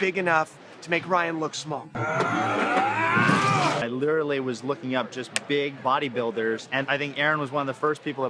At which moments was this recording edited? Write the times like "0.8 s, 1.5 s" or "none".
1.9 s, 3.8 s